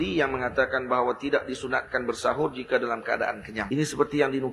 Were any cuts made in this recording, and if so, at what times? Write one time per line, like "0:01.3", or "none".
0:03.6